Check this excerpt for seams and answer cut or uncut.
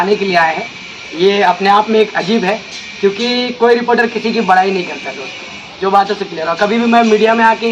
uncut